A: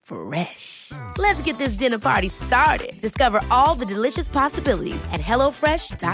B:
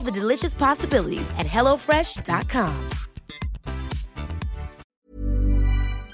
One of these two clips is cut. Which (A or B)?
B